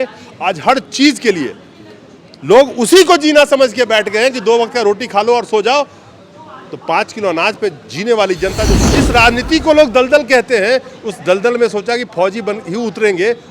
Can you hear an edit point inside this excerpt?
yes; 1 cut; at 8.9 s

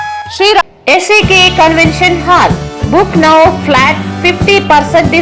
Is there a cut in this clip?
no; 0 cuts

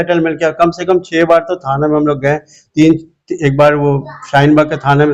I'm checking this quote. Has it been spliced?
no; 0 cuts

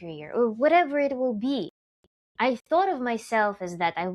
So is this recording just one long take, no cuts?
yes; 0 cuts

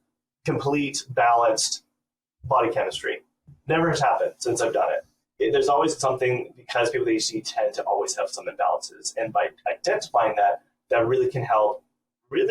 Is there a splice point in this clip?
no; 0 cuts

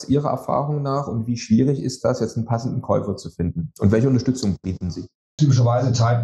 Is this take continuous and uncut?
yes; 0 cuts

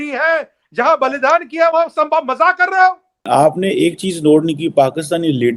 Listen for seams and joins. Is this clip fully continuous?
no; 1 cut; at 3.2 s

